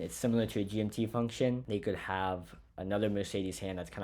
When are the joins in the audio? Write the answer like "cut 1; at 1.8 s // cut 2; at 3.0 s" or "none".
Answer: cut 1; at 1.6 s